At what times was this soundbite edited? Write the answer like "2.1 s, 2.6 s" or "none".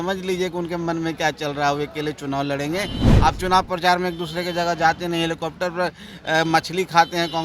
3.0 s